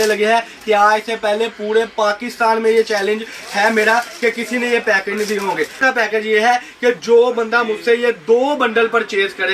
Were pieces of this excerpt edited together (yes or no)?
yes